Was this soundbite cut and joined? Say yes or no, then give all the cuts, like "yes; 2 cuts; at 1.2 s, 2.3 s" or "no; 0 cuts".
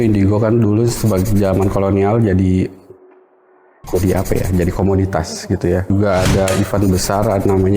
yes; 1 cut; at 5.9 s